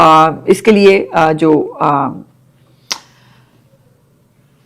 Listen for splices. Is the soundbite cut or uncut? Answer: uncut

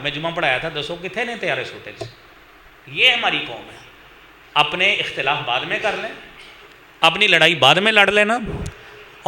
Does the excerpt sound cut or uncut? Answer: uncut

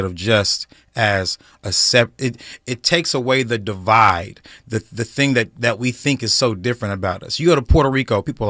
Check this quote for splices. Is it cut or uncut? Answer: uncut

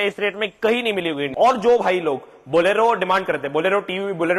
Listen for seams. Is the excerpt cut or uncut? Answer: cut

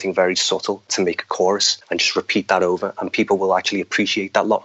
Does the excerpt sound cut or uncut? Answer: cut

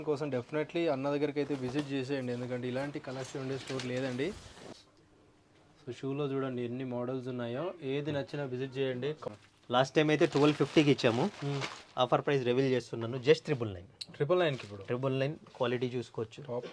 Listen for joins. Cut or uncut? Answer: cut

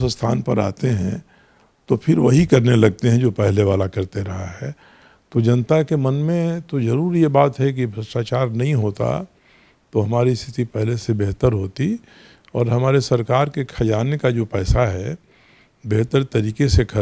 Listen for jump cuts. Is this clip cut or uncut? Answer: uncut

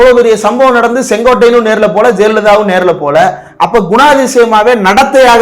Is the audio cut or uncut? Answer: uncut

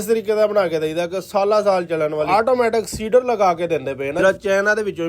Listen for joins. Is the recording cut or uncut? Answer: cut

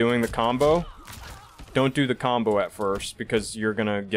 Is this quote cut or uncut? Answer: uncut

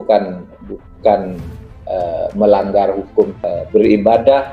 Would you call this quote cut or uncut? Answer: cut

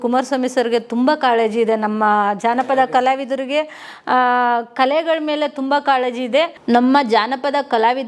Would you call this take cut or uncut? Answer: cut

